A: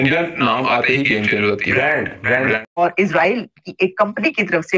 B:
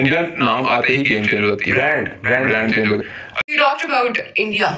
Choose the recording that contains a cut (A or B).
A